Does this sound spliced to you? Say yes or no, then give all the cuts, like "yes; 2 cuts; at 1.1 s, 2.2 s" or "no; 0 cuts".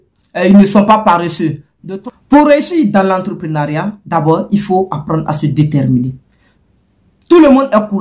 yes; 1 cut; at 1.7 s